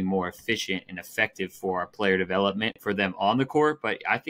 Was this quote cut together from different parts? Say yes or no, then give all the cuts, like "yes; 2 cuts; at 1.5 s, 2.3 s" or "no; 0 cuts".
no; 0 cuts